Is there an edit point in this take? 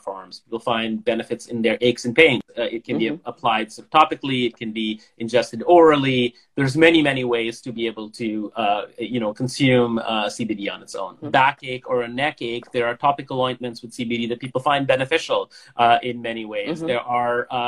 no; 0 cuts

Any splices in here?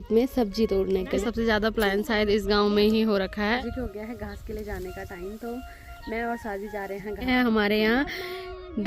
yes; 3 cuts; at 1.2 s, 3.7 s, 7.3 s

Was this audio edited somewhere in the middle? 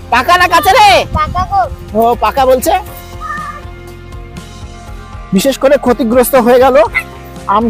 no; 0 cuts

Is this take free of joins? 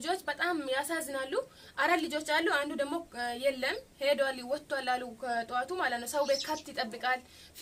yes; 0 cuts

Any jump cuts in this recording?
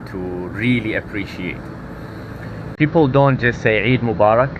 no; 0 cuts

